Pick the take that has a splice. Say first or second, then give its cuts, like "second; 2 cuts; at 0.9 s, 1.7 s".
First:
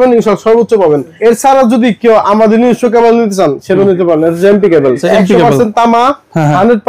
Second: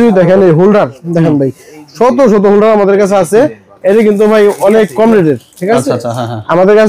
first; 2 cuts; at 1.1 s, 5.0 s